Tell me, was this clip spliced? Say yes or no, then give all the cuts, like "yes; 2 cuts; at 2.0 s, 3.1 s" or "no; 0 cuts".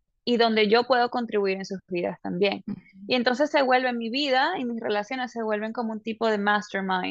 no; 0 cuts